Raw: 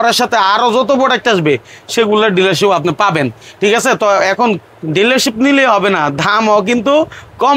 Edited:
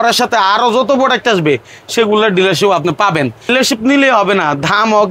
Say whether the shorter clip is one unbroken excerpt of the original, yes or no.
no